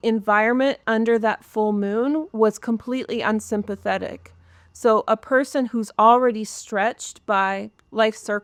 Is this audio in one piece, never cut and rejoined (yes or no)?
yes